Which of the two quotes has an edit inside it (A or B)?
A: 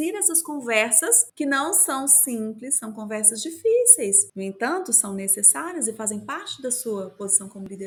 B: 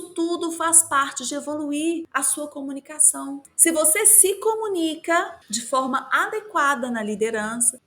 B